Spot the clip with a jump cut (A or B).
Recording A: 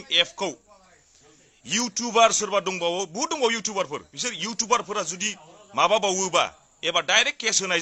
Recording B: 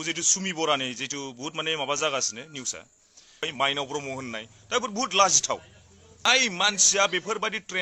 B